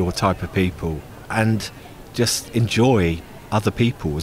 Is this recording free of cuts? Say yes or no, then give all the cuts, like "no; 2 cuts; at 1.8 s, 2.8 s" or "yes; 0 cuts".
no; 2 cuts; at 1.1 s, 3.3 s